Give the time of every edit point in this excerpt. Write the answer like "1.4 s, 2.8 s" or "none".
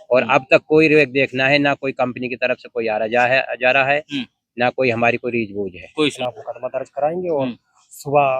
6.2 s